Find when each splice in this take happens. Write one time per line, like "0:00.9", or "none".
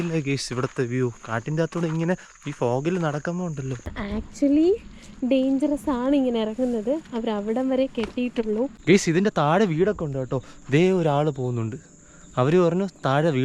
0:04.1
0:08.8